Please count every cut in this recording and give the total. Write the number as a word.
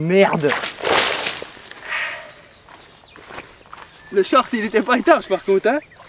one